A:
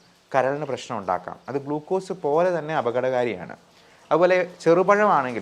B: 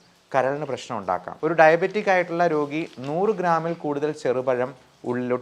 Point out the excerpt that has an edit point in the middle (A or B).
B